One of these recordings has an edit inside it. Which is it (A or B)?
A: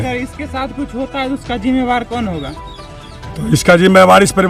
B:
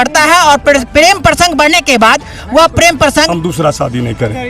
B